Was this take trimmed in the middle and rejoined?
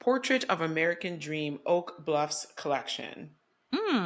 no; 0 cuts

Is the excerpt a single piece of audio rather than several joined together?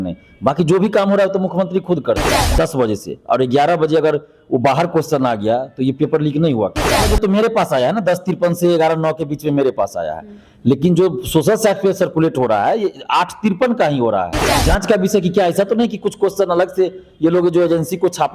no; 3 cuts; at 2.4 s, 7.0 s, 14.6 s

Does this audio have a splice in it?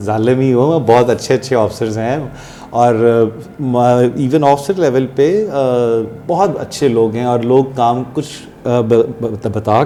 no; 0 cuts

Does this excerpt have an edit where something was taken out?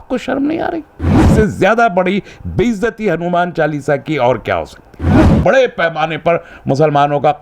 yes; 2 cuts; at 1.2 s, 5.3 s

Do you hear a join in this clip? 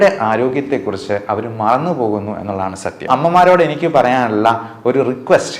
yes; 1 cut; at 3.1 s

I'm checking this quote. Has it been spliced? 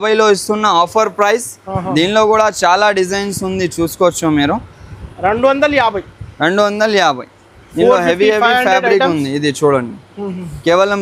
no; 0 cuts

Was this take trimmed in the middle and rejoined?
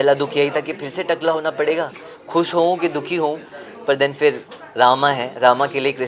no; 0 cuts

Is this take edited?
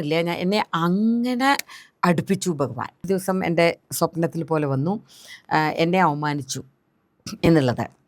yes; 1 cut; at 3.0 s

